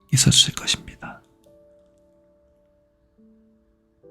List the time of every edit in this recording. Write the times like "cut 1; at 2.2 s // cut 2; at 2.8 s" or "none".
cut 1; at 1.3 s

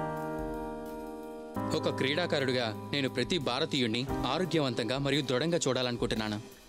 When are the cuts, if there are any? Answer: cut 1; at 1.6 s

